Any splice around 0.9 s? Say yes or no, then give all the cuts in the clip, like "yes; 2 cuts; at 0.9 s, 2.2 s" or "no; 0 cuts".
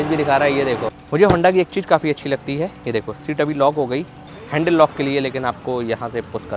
yes; 2 cuts; at 0.9 s, 4.2 s